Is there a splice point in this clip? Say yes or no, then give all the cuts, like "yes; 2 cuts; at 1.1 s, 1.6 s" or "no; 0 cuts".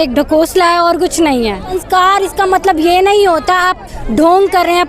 yes; 1 cut; at 1.8 s